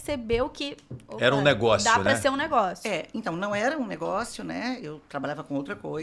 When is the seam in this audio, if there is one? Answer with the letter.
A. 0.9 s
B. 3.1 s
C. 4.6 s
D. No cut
D